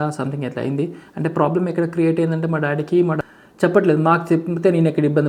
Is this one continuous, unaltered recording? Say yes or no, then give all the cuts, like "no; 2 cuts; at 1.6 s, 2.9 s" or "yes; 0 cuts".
no; 1 cut; at 3.2 s